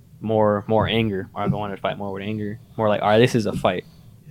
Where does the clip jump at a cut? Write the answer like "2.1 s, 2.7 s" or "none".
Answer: none